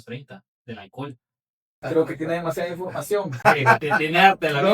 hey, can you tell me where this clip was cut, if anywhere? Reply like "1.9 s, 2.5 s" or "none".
1.8 s